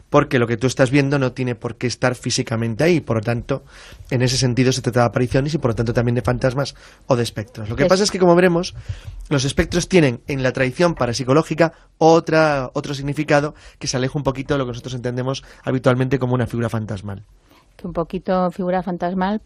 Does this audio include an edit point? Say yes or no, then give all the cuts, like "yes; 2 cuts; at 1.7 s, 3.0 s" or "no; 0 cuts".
no; 0 cuts